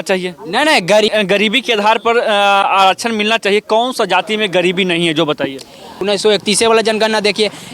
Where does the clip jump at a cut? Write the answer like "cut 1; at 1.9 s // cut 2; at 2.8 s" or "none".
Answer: cut 1; at 1.1 s // cut 2; at 6.0 s